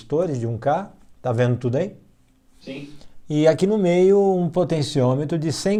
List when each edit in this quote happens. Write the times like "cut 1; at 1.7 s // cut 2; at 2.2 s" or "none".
none